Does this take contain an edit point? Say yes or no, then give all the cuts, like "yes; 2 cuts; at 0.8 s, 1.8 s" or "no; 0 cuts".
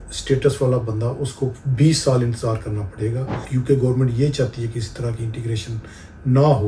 yes; 1 cut; at 3.4 s